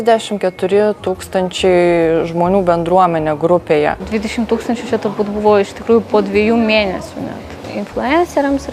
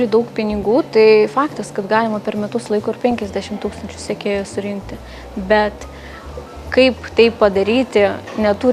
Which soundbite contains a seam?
first; 2 cuts; at 4.0 s, 7.7 s

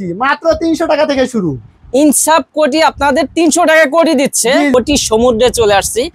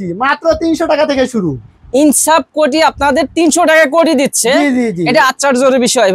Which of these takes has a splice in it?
first; 1 cut; at 4.7 s

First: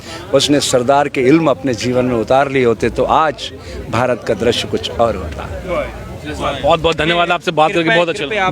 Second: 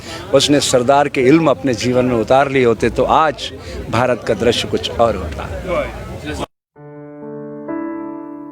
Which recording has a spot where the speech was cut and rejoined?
second; 1 cut; at 6.4 s

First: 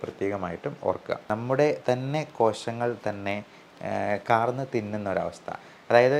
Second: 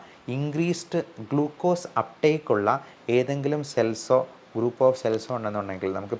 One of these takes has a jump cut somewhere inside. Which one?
first; 1 cut; at 1.2 s

